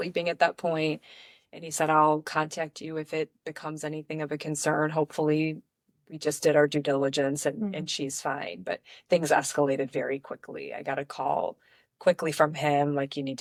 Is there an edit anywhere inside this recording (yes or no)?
no